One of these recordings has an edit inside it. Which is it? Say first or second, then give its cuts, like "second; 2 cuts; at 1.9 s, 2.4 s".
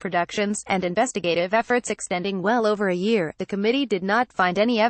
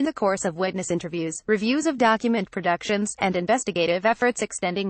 first; 1 cut; at 3.4 s